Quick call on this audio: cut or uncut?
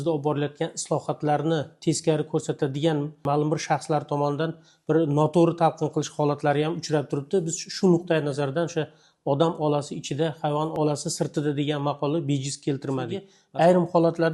cut